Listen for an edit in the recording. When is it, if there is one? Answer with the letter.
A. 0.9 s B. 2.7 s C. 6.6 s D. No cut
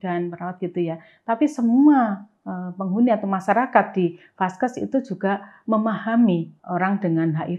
C